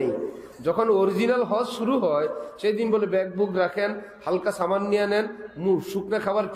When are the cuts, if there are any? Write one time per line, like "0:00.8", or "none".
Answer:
none